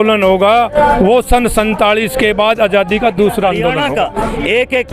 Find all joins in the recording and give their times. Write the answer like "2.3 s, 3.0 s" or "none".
3.8 s